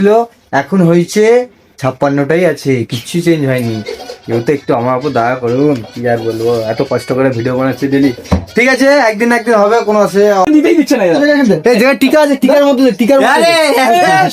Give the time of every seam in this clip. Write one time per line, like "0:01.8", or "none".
0:10.5